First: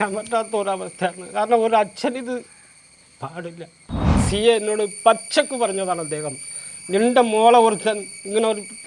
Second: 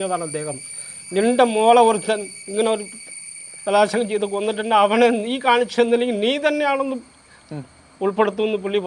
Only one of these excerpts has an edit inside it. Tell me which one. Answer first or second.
first